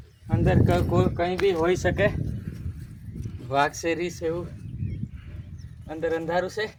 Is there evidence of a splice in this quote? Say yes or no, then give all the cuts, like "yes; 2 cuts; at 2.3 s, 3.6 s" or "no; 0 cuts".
no; 0 cuts